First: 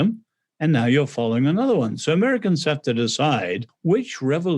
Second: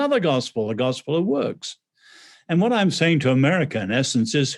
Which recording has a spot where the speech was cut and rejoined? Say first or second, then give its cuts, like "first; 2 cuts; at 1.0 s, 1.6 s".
first; 1 cut; at 3.7 s